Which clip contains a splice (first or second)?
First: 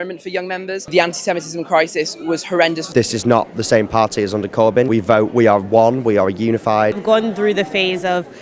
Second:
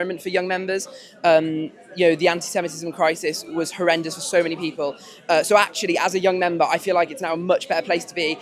first